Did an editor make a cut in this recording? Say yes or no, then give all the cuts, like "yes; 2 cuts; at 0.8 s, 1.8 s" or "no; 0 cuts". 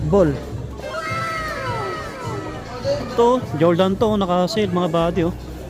no; 0 cuts